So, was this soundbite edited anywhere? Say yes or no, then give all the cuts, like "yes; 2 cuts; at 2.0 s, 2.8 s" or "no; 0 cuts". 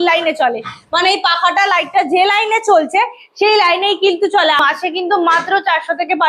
yes; 1 cut; at 4.6 s